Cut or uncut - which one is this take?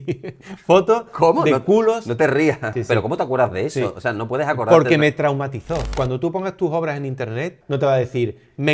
cut